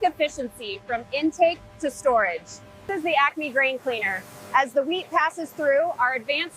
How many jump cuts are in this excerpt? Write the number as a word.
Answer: one